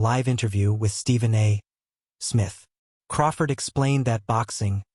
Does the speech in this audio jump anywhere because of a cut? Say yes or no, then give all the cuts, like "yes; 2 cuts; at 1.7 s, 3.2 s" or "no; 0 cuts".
yes; 1 cut; at 3.5 s